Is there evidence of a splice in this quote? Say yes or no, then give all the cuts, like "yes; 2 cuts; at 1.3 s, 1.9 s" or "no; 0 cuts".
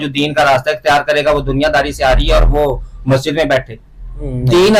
no; 0 cuts